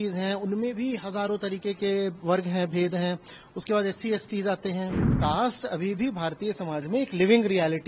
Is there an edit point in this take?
yes; 1 cut; at 5.1 s

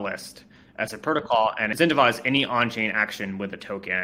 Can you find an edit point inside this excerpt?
yes; 1 cut; at 1.7 s

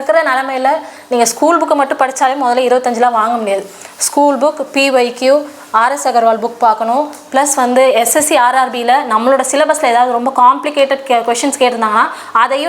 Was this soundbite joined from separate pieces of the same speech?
no; 0 cuts

